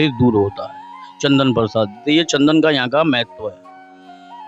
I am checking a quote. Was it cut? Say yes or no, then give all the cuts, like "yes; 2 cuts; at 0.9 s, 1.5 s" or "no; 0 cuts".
no; 0 cuts